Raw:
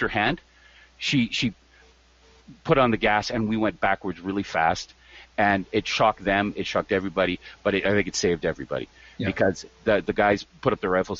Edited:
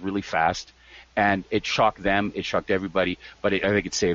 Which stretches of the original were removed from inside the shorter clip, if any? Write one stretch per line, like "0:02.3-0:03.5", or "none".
none